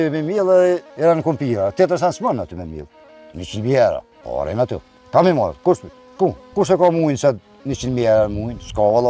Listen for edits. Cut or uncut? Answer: cut